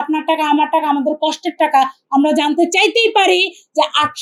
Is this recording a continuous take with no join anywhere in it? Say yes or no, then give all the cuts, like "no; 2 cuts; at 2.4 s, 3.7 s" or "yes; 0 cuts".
yes; 0 cuts